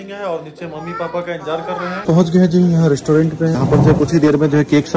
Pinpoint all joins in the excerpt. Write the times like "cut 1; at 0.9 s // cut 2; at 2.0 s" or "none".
cut 1; at 2.0 s